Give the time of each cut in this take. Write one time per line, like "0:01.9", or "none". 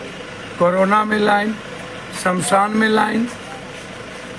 none